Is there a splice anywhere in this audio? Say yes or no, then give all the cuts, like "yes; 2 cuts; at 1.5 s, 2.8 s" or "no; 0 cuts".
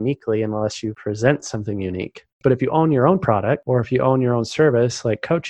yes; 3 cuts; at 0.9 s, 2.4 s, 3.6 s